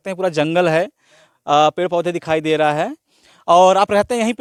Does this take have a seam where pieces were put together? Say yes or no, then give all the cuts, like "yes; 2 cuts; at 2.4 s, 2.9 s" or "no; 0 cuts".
no; 0 cuts